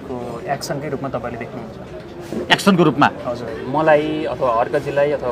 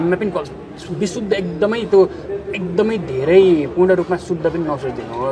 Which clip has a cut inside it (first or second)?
first